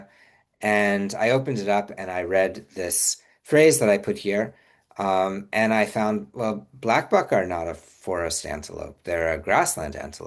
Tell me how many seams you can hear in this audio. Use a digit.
0